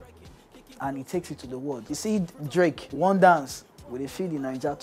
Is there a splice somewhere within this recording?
yes; 2 cuts; at 1.8 s, 2.9 s

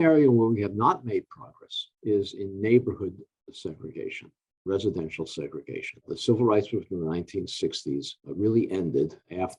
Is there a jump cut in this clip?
no; 0 cuts

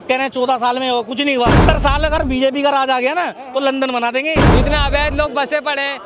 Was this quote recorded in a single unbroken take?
no; 2 cuts; at 1.6 s, 4.5 s

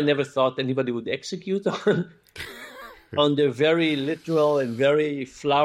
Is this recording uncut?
yes; 0 cuts

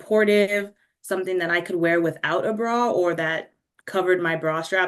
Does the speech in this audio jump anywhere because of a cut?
no; 0 cuts

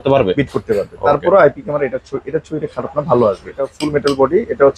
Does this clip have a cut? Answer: yes; 1 cut; at 3.7 s

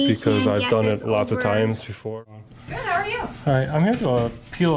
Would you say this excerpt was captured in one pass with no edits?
no; 1 cut; at 2.4 s

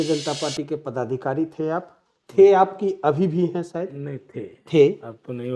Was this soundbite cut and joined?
no; 0 cuts

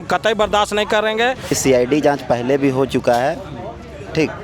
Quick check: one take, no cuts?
no; 1 cut; at 1.6 s

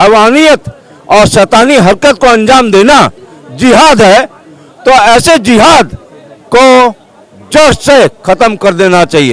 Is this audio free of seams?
yes; 0 cuts

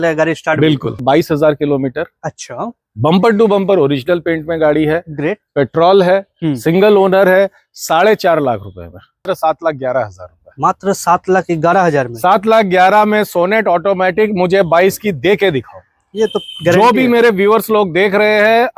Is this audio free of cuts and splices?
no; 2 cuts; at 1.0 s, 9.3 s

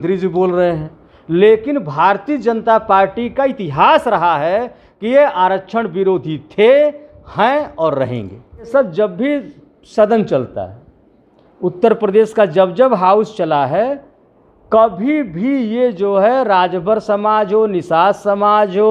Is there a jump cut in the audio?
yes; 1 cut; at 8.7 s

